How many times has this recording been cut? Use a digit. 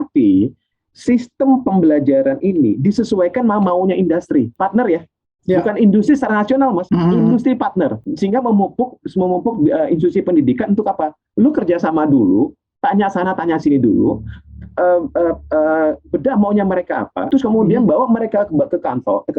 4